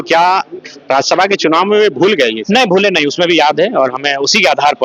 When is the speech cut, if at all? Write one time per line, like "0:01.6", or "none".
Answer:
none